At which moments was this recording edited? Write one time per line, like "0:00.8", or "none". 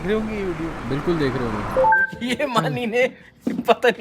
0:01.9